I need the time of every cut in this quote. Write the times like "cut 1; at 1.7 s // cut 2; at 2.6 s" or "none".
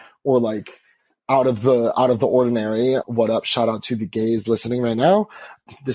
cut 1; at 3.1 s